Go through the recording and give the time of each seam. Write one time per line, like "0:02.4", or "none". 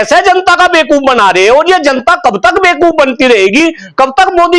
none